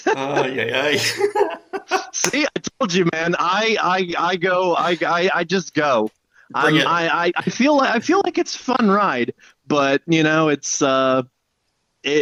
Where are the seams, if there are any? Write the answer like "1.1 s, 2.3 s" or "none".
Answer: none